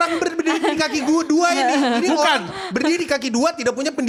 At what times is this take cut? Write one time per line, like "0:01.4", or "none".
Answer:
none